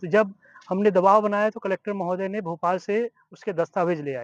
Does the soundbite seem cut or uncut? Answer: uncut